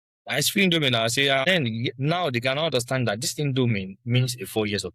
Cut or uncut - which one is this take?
cut